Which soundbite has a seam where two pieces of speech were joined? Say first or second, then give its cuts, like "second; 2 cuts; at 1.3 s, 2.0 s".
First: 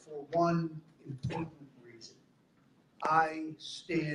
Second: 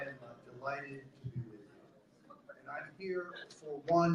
first; 1 cut; at 1.6 s